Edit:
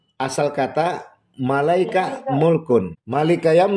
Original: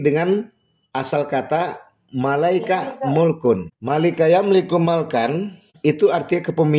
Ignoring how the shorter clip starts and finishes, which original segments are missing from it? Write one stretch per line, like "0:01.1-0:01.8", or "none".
none